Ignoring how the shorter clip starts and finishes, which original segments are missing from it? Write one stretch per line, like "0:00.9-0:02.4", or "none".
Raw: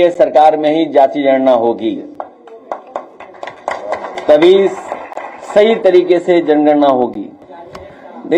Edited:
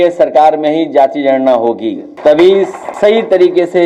0:02.1-0:04.1
0:04.9-0:05.4